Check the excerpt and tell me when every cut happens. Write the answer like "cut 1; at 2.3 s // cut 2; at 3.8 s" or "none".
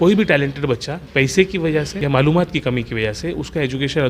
cut 1; at 1.0 s // cut 2; at 1.9 s